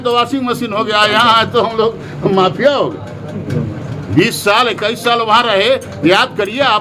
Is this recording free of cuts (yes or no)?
yes